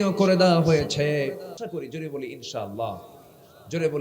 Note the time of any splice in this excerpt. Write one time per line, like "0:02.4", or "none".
0:01.5